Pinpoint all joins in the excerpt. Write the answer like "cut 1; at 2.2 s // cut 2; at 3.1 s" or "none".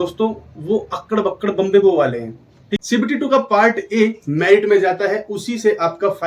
cut 1; at 2.7 s